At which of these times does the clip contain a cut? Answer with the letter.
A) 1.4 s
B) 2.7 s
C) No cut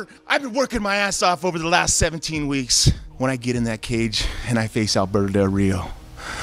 C